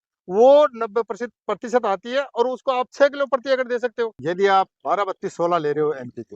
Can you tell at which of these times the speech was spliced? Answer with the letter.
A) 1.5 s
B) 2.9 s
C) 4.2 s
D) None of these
C